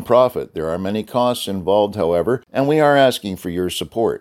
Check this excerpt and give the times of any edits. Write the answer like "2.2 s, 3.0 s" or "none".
2.5 s